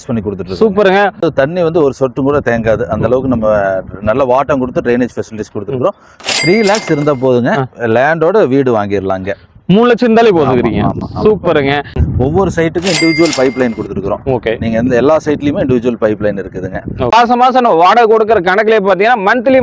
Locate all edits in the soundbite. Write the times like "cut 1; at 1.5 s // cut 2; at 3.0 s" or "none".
cut 1; at 1.2 s // cut 2; at 6.3 s // cut 3; at 11.9 s // cut 4; at 17.1 s